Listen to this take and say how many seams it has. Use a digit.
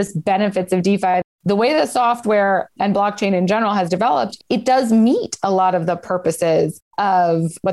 2